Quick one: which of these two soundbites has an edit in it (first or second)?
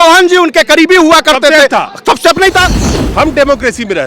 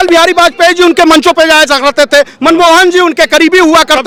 first